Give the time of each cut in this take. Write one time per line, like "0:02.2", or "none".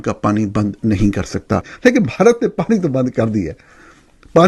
0:01.7